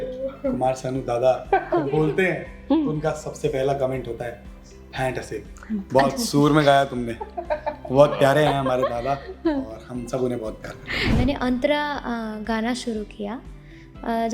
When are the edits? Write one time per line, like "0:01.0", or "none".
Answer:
0:11.1